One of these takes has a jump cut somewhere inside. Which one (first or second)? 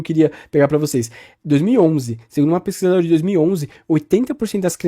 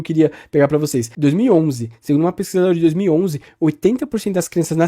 second